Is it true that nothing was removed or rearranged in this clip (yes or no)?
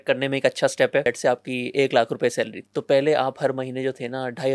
no